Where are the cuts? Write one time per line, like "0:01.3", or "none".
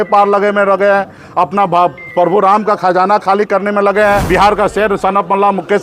0:04.2